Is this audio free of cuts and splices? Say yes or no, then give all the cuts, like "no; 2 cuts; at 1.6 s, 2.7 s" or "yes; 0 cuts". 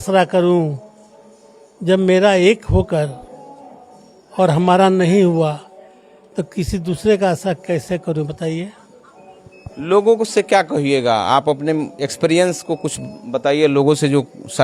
yes; 0 cuts